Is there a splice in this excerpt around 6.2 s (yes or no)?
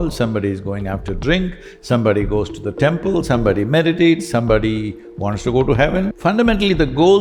yes